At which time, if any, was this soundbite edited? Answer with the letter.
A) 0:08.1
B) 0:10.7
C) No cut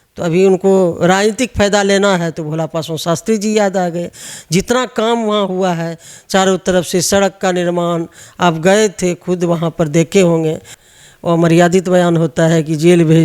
B